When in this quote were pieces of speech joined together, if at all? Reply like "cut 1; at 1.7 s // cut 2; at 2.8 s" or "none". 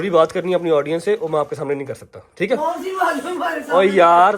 none